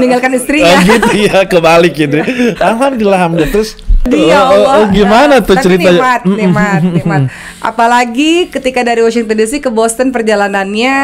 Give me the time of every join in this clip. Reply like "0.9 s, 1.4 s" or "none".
4.0 s

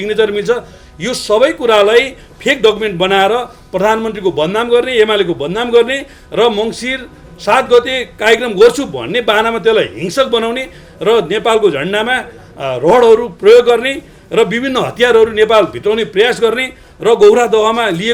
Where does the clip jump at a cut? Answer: none

